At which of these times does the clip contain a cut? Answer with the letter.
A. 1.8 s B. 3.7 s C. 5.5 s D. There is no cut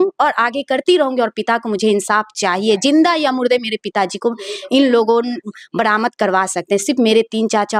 D